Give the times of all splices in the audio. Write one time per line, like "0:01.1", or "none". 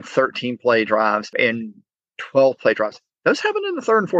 0:01.3